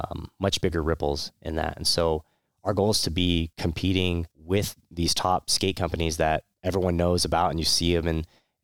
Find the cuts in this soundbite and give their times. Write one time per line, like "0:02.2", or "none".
0:03.5
0:04.3
0:06.5